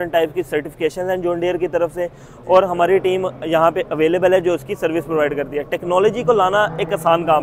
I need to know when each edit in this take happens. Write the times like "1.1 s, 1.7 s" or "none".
none